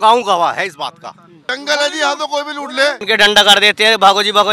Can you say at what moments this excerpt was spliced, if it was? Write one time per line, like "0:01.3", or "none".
0:01.5
0:03.0